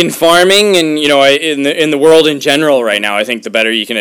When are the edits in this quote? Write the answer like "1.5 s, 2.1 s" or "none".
none